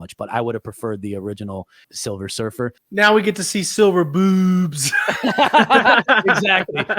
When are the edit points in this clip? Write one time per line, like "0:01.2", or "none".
0:02.8